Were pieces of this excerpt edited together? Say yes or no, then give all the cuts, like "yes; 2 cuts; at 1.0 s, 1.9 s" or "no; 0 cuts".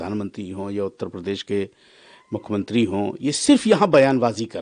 no; 0 cuts